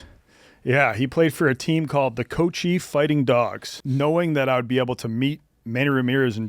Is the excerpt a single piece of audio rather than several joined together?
no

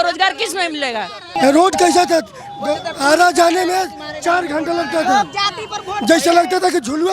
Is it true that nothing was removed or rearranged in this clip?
no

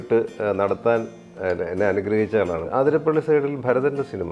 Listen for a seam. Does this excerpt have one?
yes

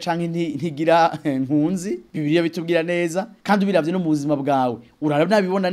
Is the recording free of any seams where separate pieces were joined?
no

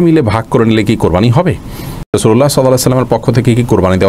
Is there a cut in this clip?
yes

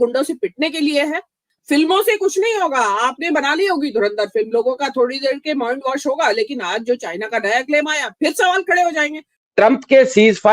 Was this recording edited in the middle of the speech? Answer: yes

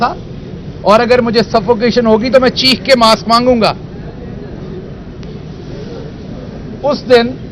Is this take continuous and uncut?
yes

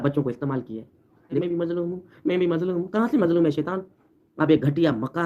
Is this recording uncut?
no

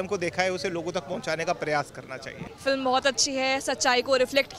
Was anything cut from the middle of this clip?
yes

